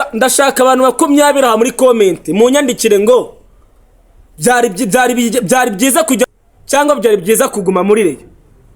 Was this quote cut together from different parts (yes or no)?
yes